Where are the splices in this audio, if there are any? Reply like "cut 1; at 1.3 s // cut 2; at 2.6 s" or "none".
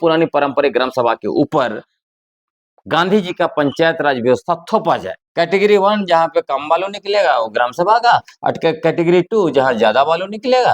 cut 1; at 5.2 s